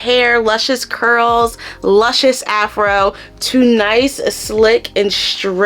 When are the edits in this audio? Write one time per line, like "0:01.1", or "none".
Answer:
none